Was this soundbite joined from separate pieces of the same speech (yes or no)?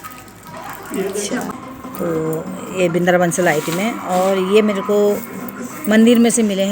yes